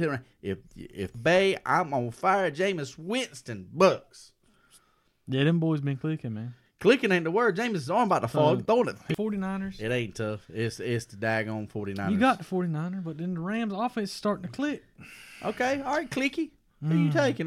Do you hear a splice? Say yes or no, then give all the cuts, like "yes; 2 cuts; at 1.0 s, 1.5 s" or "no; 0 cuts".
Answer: yes; 2 cuts; at 1.1 s, 9.0 s